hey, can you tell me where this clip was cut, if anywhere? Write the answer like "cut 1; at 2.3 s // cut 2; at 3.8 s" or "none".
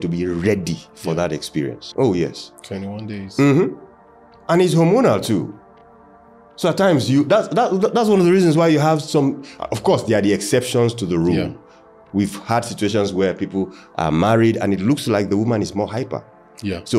cut 1; at 1.8 s